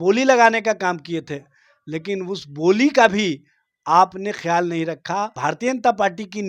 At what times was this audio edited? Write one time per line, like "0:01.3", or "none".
0:05.3